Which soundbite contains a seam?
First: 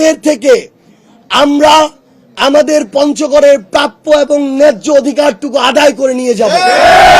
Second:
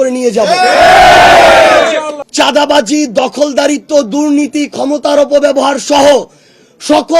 second; 1 cut; at 2.2 s

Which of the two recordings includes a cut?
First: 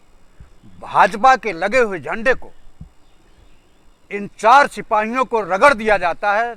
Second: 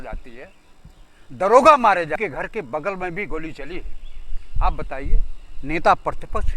second; 1 cut; at 2.2 s

